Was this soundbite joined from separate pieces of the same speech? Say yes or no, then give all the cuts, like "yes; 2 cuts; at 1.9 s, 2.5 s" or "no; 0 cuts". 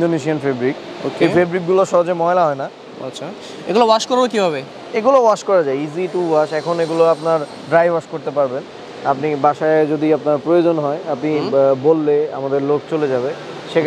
no; 0 cuts